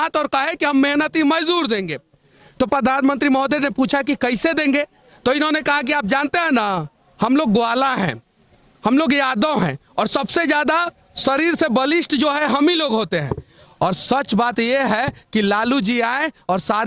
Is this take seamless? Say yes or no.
yes